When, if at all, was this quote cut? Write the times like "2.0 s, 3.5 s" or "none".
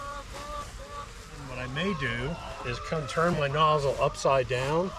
1.5 s